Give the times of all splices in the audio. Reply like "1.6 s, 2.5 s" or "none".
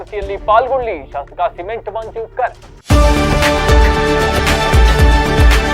2.7 s